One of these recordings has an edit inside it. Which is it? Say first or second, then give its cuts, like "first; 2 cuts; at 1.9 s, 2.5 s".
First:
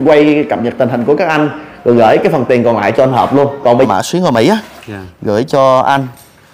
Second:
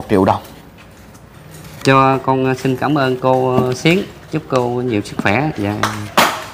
first; 1 cut; at 3.9 s